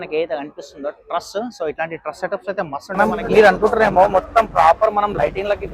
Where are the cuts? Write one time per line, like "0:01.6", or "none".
0:03.0